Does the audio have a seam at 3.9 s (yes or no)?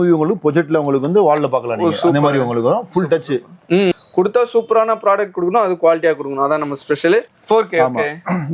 yes